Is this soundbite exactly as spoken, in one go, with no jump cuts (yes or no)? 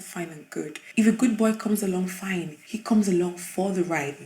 no